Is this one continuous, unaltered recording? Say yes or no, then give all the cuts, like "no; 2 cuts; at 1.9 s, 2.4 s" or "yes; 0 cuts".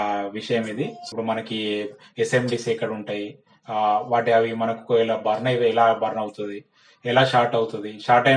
no; 1 cut; at 1.0 s